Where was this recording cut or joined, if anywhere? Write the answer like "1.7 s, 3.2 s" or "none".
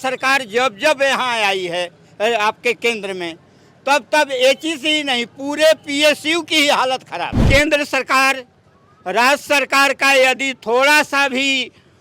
7.4 s